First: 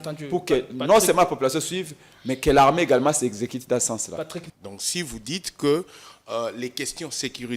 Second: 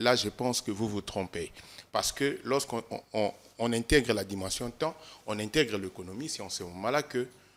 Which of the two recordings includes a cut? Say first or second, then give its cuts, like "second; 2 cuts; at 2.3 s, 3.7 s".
first; 1 cut; at 4.5 s